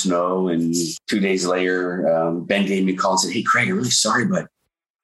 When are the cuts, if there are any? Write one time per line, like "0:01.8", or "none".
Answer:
0:00.9